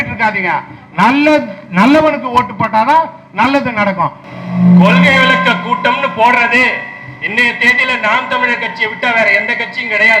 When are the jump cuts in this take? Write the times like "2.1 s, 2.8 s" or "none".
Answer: 4.2 s